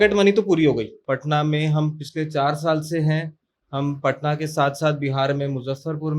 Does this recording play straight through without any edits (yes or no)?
no